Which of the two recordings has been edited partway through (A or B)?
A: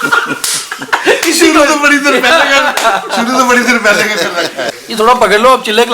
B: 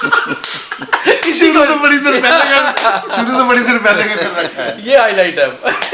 A